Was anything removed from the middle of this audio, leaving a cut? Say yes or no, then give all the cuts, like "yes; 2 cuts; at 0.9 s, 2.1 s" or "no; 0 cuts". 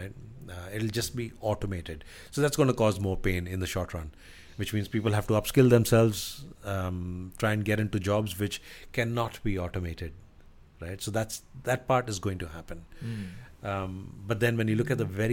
no; 0 cuts